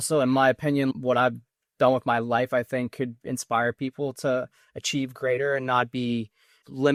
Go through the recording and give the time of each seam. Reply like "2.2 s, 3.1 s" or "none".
none